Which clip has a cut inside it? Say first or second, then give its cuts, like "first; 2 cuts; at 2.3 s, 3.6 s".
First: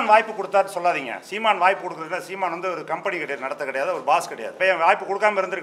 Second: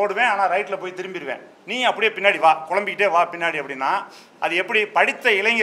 first; 1 cut; at 4.6 s